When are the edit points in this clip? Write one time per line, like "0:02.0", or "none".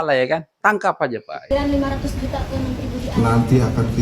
0:01.5